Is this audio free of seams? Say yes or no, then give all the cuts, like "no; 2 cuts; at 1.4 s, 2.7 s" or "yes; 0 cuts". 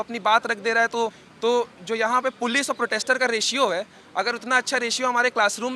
no; 1 cut; at 1.2 s